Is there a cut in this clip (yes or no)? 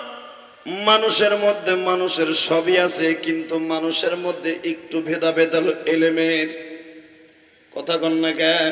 no